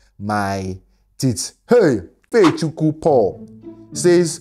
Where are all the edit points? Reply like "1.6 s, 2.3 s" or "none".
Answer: 2.3 s